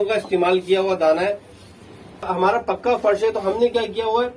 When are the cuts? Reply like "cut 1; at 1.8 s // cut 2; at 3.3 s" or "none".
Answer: cut 1; at 2.3 s